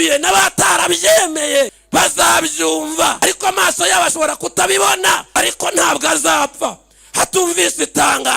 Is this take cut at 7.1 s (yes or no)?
no